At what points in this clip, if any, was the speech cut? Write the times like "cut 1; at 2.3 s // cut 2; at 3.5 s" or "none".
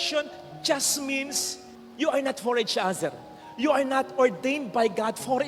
none